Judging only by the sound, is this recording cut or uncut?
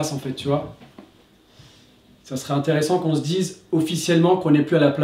uncut